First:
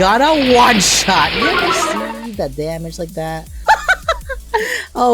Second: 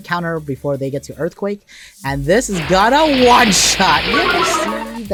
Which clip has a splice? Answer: first; 1 cut; at 3.5 s

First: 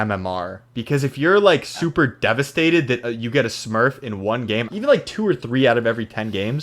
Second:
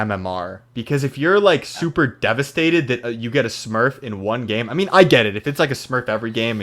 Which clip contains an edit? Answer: first; 1 cut; at 4.7 s

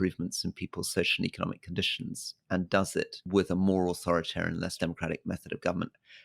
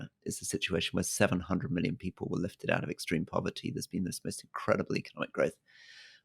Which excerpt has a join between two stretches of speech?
first; 2 cuts; at 3.2 s, 4.7 s

